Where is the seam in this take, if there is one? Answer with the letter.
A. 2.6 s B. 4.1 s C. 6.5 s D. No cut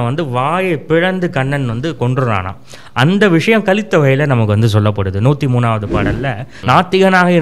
C